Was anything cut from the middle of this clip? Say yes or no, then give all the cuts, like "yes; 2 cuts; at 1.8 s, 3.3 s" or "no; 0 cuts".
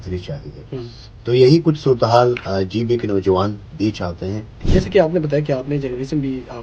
yes; 1 cut; at 4.6 s